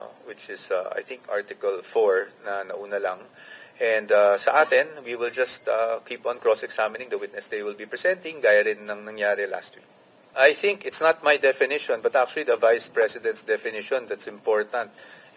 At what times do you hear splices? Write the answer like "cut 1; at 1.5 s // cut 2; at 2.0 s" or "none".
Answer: cut 1; at 10.3 s